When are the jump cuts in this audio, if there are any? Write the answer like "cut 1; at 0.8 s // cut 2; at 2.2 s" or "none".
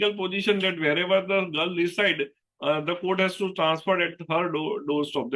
none